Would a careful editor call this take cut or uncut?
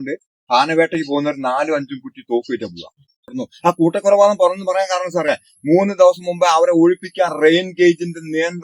cut